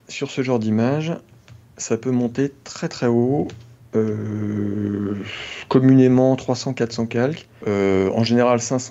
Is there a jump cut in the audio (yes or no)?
yes